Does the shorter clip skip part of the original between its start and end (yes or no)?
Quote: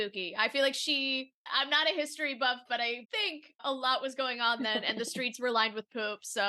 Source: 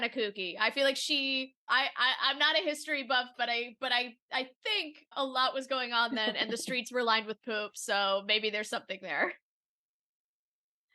yes